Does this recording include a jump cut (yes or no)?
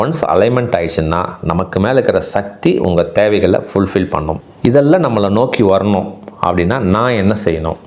yes